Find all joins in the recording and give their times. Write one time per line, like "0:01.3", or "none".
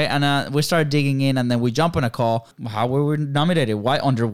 0:02.6